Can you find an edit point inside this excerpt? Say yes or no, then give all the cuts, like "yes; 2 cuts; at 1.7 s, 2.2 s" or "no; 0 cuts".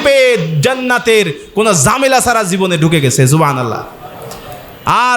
no; 0 cuts